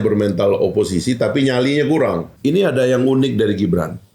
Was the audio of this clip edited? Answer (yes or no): yes